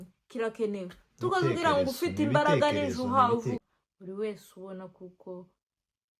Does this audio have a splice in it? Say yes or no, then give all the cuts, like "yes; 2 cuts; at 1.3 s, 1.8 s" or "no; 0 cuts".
yes; 1 cut; at 3.7 s